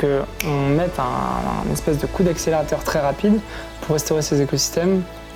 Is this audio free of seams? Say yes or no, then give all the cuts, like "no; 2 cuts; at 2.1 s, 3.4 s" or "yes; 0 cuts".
yes; 0 cuts